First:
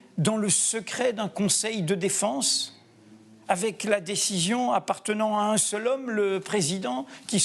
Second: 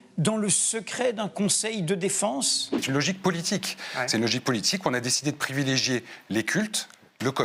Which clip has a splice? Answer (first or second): second